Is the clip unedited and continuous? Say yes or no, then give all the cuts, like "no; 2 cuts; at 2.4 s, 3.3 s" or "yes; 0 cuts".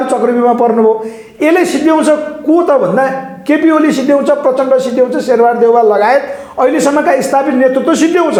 yes; 0 cuts